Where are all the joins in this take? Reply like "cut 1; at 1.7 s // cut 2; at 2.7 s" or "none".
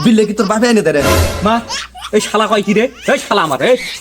none